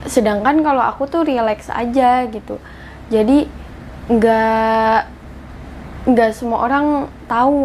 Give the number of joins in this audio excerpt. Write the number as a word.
zero